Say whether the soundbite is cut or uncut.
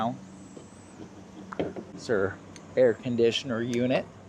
cut